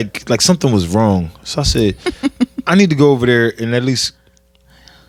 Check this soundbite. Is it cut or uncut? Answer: uncut